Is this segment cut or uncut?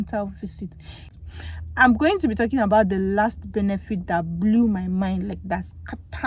cut